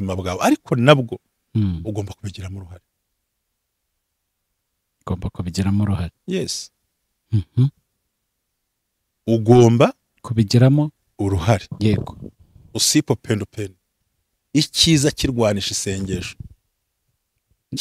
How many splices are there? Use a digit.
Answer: 0